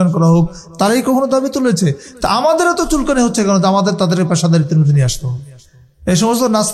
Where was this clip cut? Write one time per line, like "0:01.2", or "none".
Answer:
none